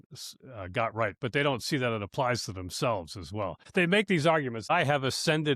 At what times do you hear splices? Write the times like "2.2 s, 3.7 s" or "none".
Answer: 3.6 s, 4.7 s